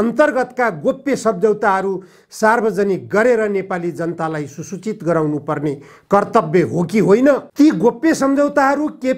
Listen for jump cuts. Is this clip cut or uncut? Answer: cut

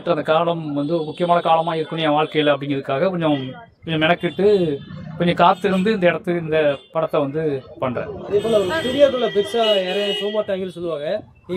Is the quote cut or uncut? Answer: uncut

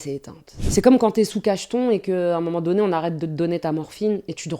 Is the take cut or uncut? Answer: uncut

